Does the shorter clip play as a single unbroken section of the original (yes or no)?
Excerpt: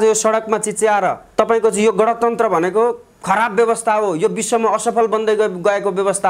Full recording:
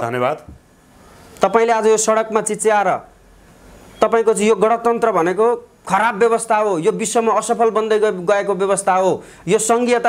no